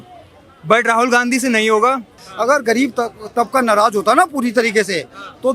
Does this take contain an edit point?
yes; 1 cut; at 2.2 s

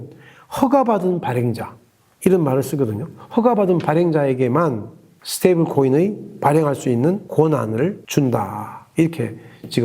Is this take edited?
yes; 1 cut; at 7.4 s

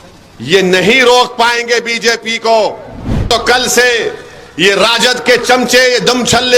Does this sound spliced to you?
yes; 1 cut; at 3.2 s

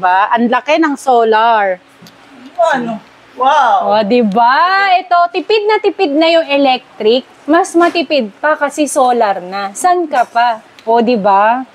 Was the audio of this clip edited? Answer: no; 0 cuts

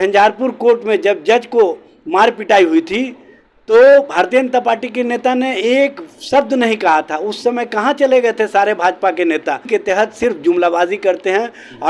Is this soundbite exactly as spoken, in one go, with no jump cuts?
no; 1 cut; at 9.7 s

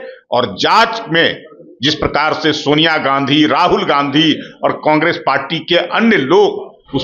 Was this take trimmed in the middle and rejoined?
no; 0 cuts

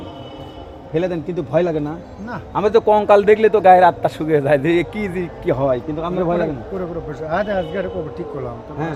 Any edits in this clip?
no; 0 cuts

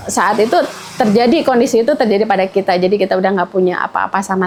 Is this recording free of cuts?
yes; 0 cuts

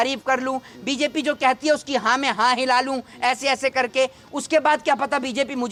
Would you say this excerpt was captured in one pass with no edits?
yes; 0 cuts

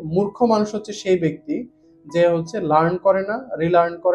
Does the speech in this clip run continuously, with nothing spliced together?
yes; 0 cuts

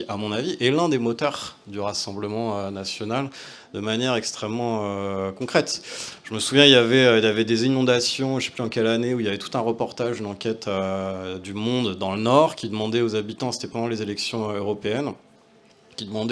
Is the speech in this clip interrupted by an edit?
no; 0 cuts

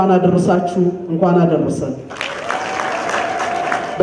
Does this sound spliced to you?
no; 0 cuts

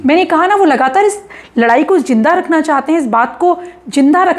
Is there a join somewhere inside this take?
no; 0 cuts

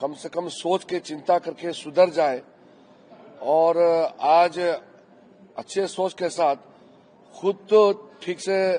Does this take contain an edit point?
no; 0 cuts

